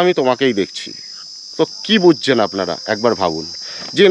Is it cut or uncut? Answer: uncut